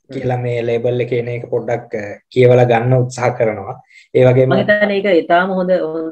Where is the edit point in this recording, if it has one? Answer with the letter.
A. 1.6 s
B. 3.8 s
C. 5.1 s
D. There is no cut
D